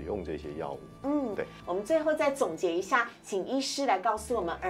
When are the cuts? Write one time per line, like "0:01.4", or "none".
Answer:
none